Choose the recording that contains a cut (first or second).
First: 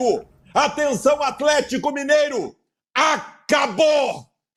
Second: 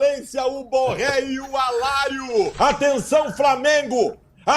second